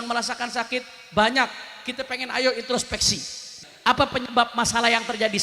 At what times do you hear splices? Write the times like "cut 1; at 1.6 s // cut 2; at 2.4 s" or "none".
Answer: cut 1; at 3.5 s